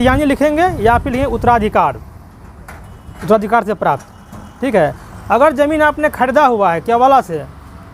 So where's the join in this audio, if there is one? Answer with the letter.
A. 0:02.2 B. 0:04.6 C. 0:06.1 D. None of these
D